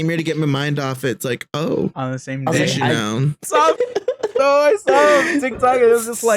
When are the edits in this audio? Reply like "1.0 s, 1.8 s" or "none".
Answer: 3.4 s